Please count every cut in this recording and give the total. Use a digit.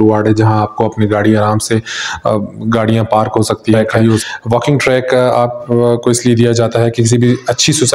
1